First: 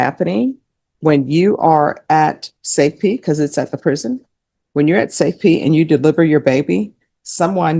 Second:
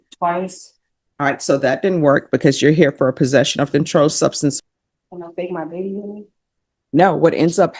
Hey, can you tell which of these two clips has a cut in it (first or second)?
second